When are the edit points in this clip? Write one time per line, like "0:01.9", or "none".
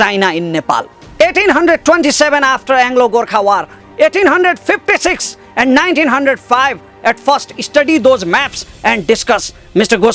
0:00.9